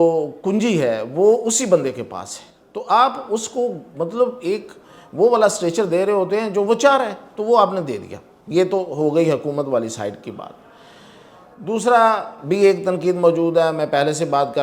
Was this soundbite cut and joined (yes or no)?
no